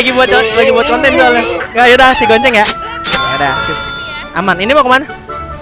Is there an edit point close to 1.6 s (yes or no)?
yes